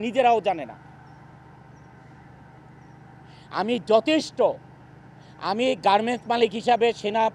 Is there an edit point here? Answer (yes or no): no